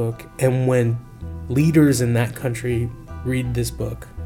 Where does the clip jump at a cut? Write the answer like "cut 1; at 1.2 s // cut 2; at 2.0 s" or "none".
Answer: none

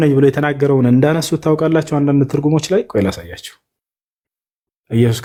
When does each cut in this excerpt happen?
none

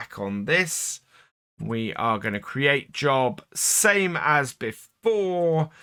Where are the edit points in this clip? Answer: none

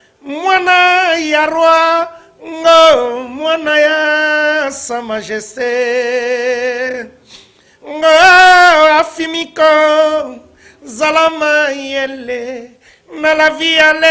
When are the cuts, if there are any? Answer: none

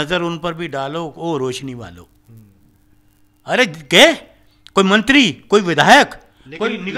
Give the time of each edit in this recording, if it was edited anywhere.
none

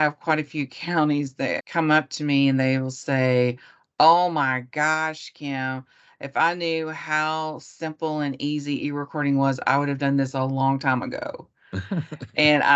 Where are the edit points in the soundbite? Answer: cut 1; at 1.6 s

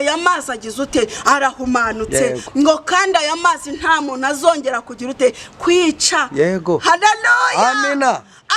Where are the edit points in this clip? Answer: none

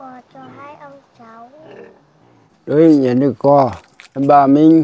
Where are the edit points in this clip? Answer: cut 1; at 2.5 s

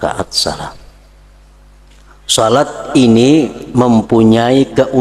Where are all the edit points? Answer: cut 1; at 1.9 s

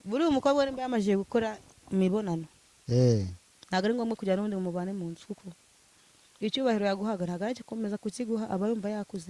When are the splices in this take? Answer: none

